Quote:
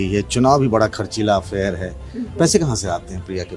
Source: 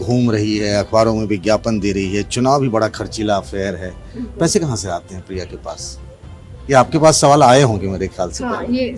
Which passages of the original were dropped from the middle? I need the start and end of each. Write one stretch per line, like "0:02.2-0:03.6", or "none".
none